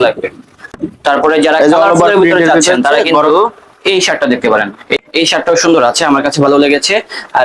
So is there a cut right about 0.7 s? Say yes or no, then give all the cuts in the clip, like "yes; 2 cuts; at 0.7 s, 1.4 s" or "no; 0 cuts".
yes; 2 cuts; at 0.7 s, 5.0 s